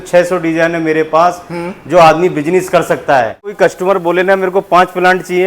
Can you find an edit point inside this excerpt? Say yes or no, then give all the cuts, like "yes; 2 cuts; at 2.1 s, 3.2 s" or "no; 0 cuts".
yes; 1 cut; at 3.5 s